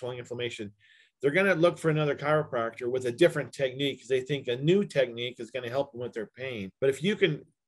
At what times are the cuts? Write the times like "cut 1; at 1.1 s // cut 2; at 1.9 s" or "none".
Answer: cut 1; at 6.7 s